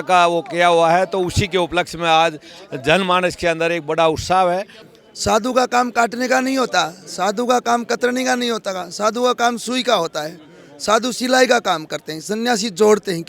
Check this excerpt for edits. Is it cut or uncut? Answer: cut